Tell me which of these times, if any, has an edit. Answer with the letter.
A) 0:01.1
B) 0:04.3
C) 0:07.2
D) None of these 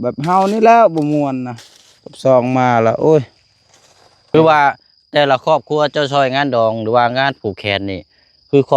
B